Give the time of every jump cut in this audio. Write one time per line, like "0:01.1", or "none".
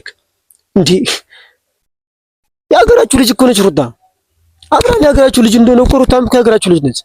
none